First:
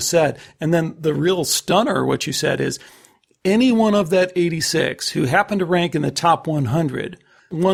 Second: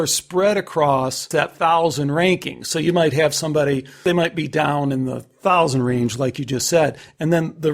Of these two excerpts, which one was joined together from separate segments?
second; 2 cuts; at 1.3 s, 4.0 s

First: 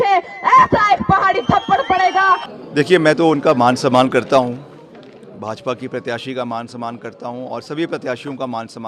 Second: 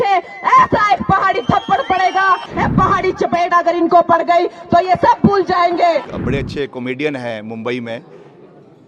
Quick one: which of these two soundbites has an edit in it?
second; 2 cuts; at 2.6 s, 6.1 s

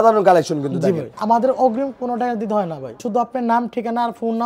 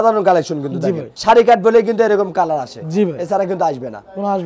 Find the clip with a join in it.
first; 2 cuts; at 1.1 s, 3.0 s

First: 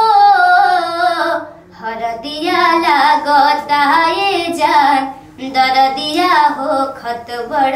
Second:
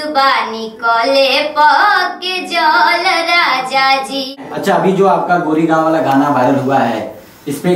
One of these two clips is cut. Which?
second; 1 cut; at 4.5 s

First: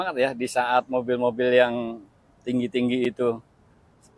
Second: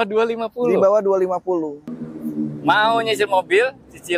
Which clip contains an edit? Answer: second; 1 cut; at 1.8 s

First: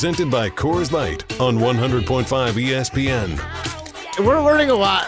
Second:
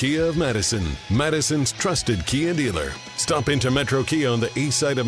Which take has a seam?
first; 1 cut; at 4.0 s

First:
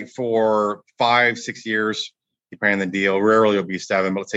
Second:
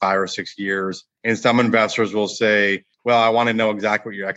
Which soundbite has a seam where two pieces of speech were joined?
second; 2 cuts; at 1.1 s, 2.9 s

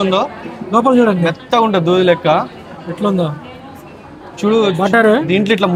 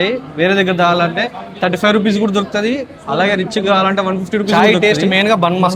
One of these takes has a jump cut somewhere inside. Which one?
second; 1 cut; at 4.5 s

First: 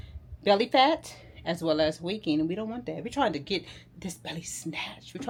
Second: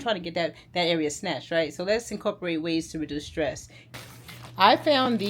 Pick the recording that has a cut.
second; 1 cut; at 3.9 s

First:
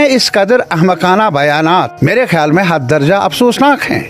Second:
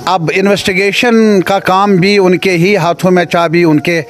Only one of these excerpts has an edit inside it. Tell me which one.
first; 1 cut; at 1.9 s

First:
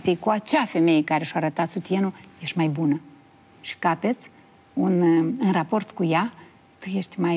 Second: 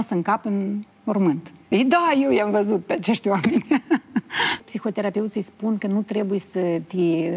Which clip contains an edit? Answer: second; 2 cuts; at 1.5 s, 4.7 s

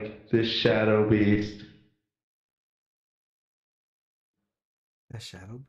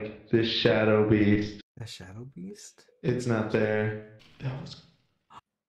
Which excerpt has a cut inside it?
second; 2 cuts; at 1.6 s, 4.2 s

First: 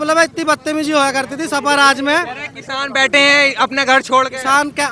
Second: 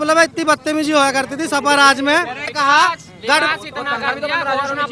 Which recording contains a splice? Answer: second; 1 cut; at 2.5 s

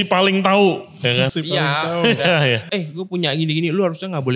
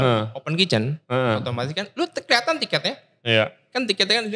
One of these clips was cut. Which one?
first; 2 cuts; at 1.3 s, 2.6 s

